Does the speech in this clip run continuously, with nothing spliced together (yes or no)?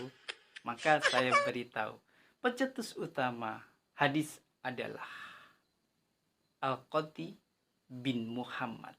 yes